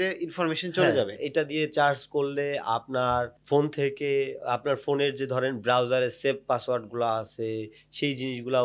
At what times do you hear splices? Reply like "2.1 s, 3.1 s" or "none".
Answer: none